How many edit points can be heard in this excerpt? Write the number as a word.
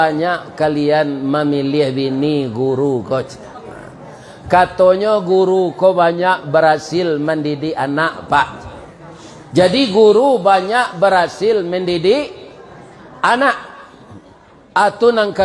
zero